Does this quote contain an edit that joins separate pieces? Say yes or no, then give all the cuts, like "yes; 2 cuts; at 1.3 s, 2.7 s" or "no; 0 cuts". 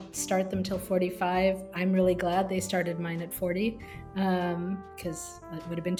no; 0 cuts